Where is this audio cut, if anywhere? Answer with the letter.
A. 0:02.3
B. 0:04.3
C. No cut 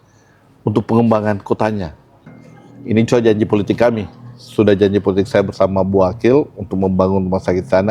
A